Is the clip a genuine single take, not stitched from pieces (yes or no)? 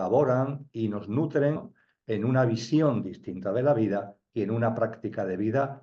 no